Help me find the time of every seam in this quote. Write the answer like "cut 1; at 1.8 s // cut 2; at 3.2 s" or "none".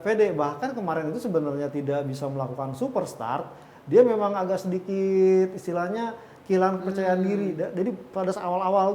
none